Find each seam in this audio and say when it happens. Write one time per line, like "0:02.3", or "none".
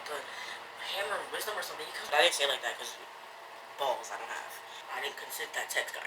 0:02.0
0:04.7